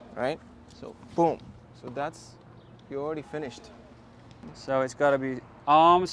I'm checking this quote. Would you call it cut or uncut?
cut